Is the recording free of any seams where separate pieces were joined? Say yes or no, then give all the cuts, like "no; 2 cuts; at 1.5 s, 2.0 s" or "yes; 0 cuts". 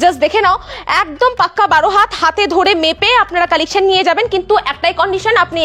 yes; 0 cuts